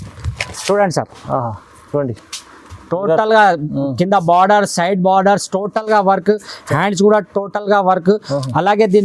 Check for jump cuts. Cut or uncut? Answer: uncut